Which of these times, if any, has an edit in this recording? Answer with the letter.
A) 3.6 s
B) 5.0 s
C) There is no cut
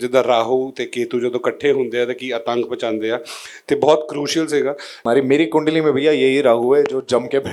B